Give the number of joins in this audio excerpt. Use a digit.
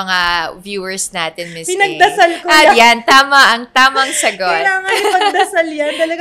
0